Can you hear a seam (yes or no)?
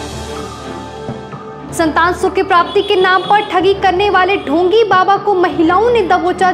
no